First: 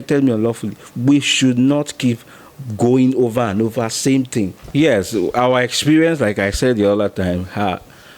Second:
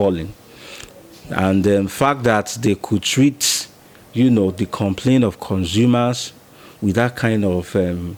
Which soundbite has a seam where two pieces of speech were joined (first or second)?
first